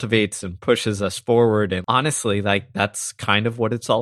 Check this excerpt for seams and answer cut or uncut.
cut